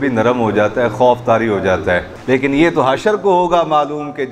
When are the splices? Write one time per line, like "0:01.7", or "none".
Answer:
0:02.1